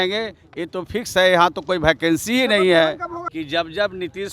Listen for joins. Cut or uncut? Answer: cut